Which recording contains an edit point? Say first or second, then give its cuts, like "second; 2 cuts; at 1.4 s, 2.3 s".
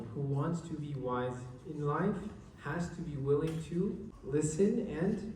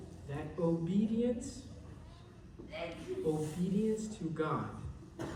first; 1 cut; at 4.1 s